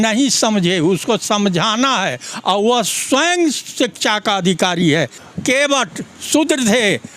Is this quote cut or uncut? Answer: cut